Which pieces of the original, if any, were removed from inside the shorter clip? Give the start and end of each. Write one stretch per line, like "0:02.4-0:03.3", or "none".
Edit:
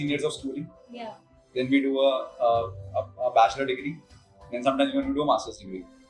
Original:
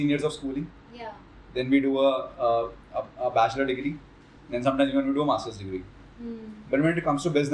none